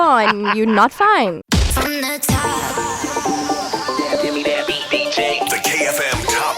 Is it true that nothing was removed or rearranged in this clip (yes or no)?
no